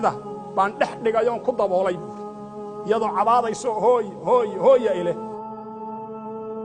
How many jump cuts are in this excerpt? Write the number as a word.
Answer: one